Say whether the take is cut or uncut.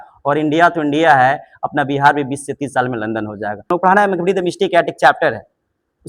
cut